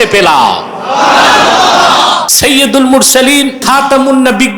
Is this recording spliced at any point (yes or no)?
yes